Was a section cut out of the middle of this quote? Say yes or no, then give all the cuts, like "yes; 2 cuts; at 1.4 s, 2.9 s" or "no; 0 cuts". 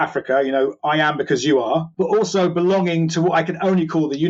yes; 1 cut; at 1.9 s